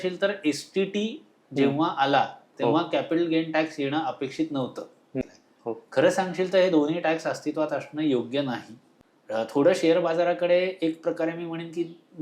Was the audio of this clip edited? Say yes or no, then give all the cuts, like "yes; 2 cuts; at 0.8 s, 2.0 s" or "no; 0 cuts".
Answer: yes; 2 cuts; at 5.2 s, 8.9 s